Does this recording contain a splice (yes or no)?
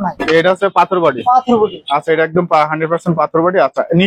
no